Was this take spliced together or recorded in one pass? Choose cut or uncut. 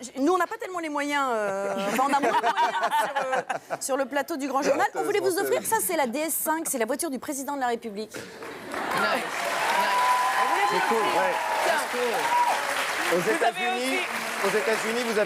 uncut